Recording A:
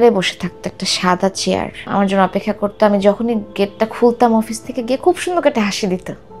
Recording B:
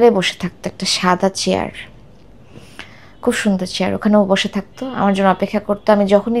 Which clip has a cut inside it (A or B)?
A